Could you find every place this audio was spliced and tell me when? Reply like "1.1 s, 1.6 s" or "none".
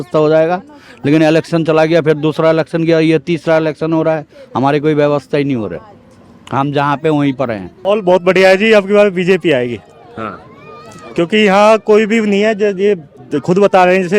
7.8 s